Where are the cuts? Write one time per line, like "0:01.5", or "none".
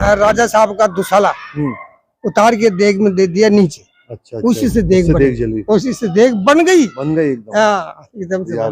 none

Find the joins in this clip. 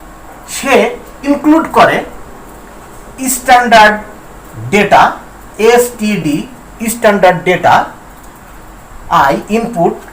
0:01.2

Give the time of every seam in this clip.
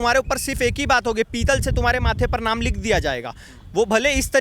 none

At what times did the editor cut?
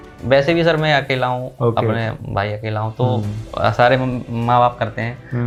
none

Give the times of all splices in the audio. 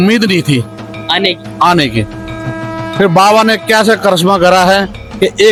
none

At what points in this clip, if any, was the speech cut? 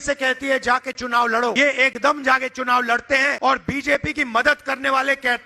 0:01.6
0:03.3

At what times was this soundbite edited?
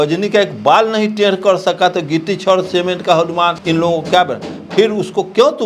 0:03.6

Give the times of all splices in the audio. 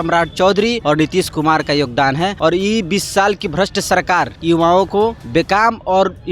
0:00.8
0:02.4
0:04.3
0:05.2

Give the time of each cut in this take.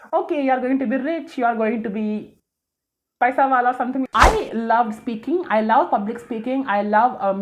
0:04.1

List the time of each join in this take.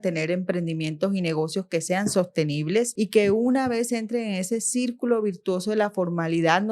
0:02.9

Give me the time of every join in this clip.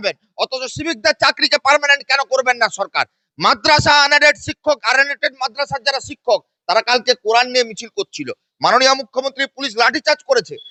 none

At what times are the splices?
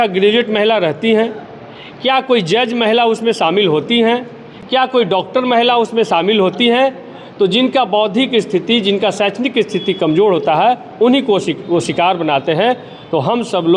none

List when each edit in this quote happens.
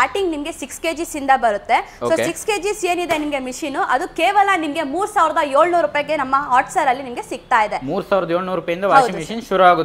none

